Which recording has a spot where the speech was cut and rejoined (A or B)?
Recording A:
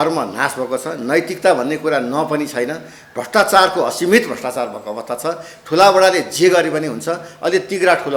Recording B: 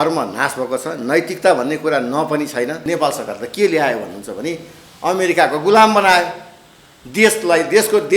B